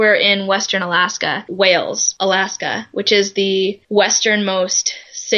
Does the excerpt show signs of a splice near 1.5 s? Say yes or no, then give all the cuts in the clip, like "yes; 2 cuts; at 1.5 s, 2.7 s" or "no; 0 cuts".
yes; 3 cuts; at 1.5 s, 2.0 s, 3.8 s